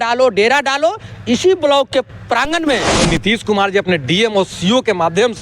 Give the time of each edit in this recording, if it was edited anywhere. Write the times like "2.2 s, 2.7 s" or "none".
2.9 s